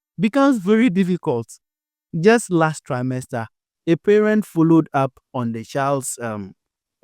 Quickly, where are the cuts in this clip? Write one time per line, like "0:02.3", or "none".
0:02.1